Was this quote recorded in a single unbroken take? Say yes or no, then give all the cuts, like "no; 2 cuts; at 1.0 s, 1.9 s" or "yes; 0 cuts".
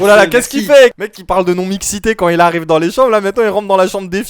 no; 1 cut; at 1.0 s